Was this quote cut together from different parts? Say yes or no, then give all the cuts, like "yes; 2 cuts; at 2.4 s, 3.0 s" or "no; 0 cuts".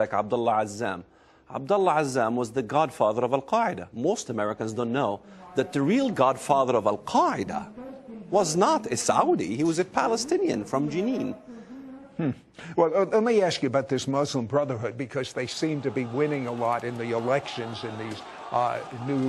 no; 0 cuts